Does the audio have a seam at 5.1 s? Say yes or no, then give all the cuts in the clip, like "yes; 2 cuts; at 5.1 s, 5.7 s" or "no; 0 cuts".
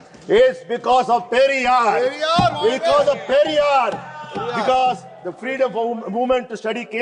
no; 0 cuts